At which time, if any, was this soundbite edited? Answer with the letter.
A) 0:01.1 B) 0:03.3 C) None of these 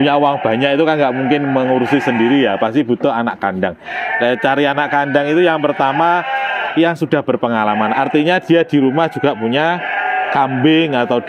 C